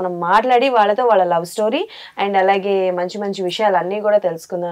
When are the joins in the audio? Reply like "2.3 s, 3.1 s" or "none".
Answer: none